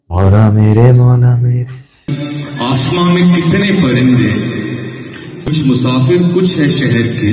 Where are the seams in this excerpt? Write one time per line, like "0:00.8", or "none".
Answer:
0:02.1
0:05.5